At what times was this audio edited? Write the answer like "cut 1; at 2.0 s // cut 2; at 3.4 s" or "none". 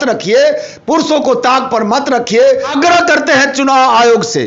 cut 1; at 2.7 s

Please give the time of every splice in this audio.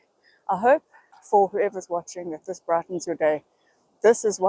cut 1; at 1.2 s

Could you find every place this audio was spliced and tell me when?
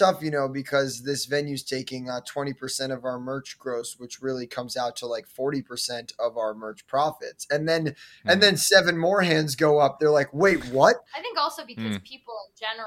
cut 1; at 11.0 s

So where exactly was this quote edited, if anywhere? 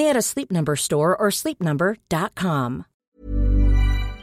cut 1; at 2.9 s

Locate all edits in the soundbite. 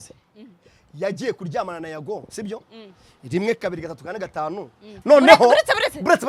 cut 1; at 4.9 s

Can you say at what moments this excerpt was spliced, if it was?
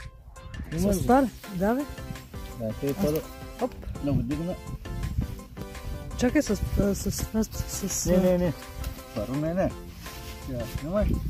none

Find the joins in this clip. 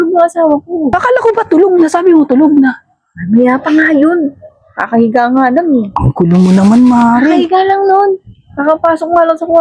cut 1; at 0.9 s

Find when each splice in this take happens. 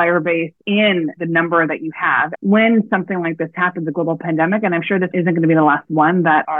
cut 1; at 2.3 s

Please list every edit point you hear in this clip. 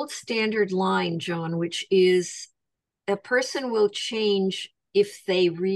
none

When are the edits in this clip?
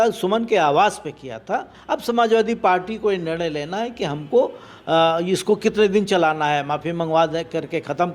cut 1; at 1.7 s

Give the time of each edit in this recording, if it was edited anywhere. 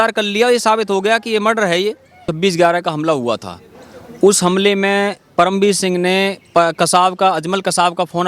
cut 1; at 2.3 s

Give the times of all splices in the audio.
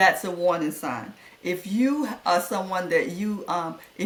none

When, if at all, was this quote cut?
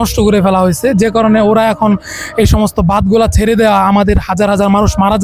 none

